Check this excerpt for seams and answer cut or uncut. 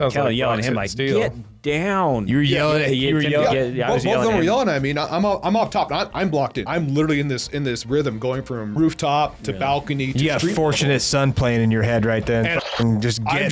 cut